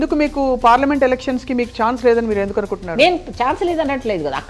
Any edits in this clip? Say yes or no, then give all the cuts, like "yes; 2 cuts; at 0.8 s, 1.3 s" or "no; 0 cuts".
no; 0 cuts